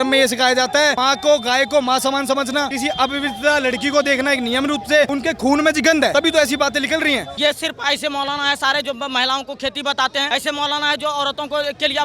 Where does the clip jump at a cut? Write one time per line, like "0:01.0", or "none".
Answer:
0:01.0
0:02.7
0:05.1
0:06.1
0:07.3
0:10.3